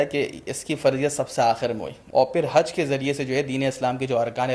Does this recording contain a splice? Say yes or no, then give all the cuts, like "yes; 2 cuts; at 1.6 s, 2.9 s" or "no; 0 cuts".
yes; 1 cut; at 1.9 s